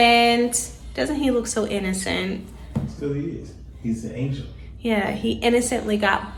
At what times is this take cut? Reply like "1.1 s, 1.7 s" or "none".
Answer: none